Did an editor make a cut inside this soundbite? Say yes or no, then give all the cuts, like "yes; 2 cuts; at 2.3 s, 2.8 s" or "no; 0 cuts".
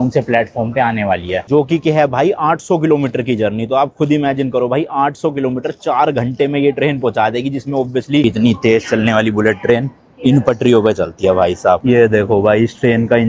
yes; 3 cuts; at 1.4 s, 8.2 s, 11.8 s